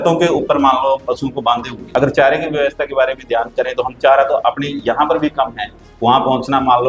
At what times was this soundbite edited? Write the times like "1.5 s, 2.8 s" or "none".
1.7 s